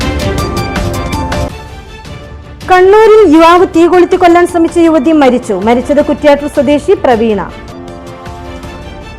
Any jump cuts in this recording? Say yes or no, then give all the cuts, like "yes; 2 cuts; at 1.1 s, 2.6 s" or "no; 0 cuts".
yes; 1 cut; at 1.2 s